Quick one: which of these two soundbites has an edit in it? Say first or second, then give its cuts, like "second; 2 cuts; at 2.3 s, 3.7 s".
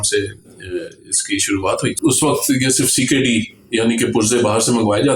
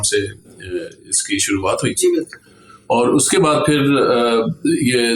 first; 1 cut; at 1.9 s